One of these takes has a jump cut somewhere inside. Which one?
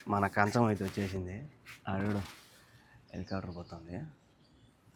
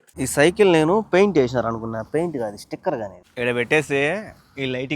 second; 1 cut; at 3.2 s

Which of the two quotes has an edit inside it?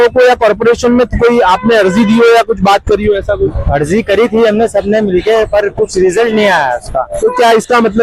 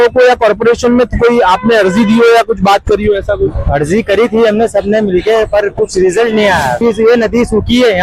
second; 1 cut; at 6.8 s

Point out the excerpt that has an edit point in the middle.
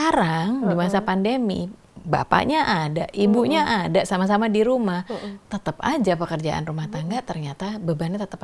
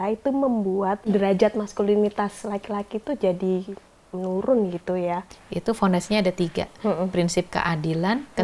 second; 2 cuts; at 1.1 s, 5.3 s

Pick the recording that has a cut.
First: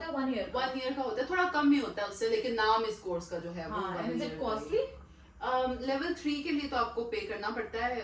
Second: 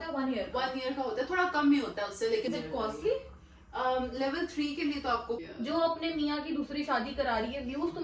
second; 2 cuts; at 2.5 s, 5.4 s

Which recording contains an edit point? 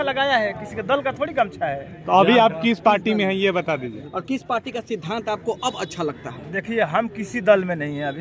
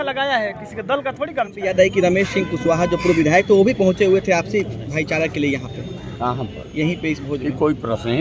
second; 1 cut; at 1.6 s

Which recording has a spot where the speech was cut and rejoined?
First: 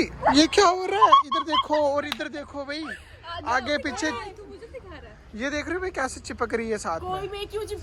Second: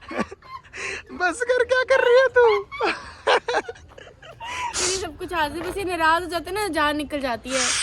second; 1 cut; at 4.8 s

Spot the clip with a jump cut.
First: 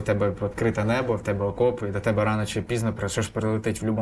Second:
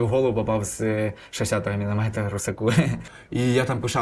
second; 1 cut; at 3.1 s

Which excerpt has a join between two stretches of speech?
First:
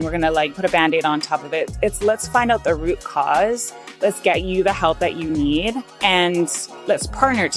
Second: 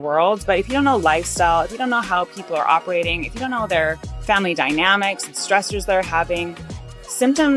first; 1 cut; at 6.7 s

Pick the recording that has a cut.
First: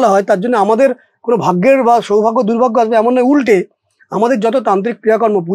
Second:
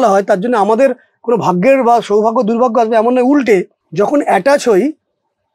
second; 1 cut; at 3.8 s

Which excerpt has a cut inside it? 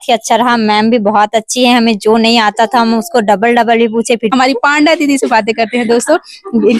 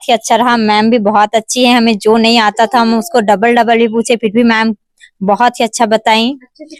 first; 1 cut; at 4.3 s

